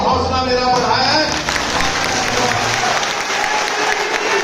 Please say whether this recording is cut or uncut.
uncut